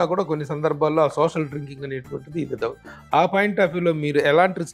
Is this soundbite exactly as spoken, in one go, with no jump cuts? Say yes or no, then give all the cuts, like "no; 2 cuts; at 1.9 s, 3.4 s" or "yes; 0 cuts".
yes; 0 cuts